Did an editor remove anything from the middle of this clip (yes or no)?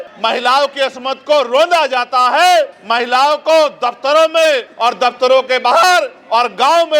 no